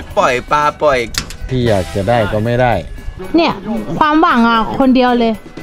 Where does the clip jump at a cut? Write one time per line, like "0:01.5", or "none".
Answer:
0:01.5

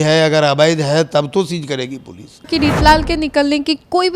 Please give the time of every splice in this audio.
0:02.5

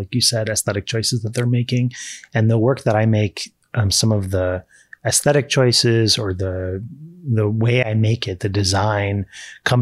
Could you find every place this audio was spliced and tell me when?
none

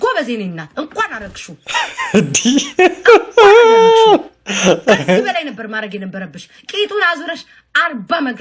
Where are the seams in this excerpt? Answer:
none

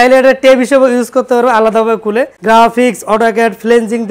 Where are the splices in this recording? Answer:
0:02.3

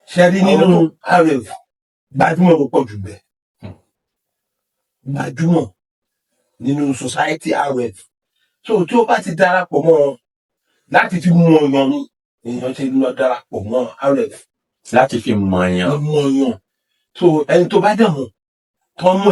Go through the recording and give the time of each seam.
none

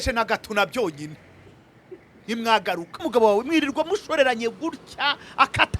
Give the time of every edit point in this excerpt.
0:03.0

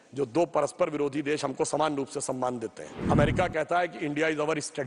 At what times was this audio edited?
0:02.9

